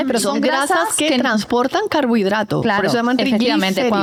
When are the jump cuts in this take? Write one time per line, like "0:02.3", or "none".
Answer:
none